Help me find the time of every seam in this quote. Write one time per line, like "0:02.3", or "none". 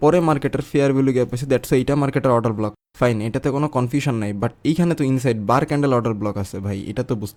none